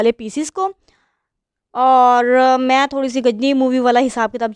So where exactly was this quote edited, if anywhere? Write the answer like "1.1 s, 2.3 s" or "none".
none